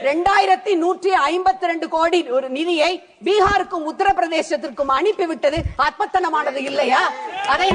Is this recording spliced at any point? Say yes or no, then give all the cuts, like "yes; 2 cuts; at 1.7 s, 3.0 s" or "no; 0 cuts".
no; 0 cuts